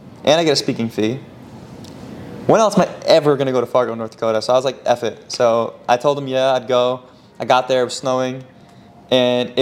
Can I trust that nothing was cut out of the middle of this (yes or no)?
yes